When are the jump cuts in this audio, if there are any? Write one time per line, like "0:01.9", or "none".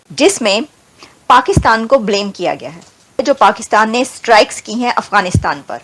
0:03.2